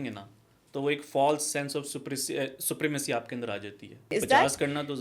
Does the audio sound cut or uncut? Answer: cut